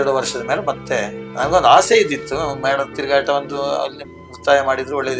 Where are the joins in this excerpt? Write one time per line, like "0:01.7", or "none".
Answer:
0:01.2